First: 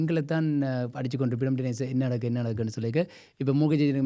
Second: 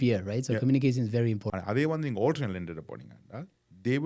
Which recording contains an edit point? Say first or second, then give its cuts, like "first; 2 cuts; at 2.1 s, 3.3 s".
second; 1 cut; at 1.4 s